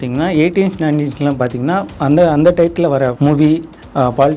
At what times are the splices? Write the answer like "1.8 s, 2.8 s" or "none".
3.2 s